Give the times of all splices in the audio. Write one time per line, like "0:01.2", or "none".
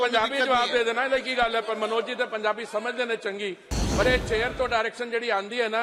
none